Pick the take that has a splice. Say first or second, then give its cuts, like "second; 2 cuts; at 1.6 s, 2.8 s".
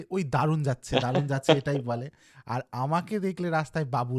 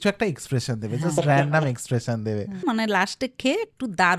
second; 1 cut; at 2.6 s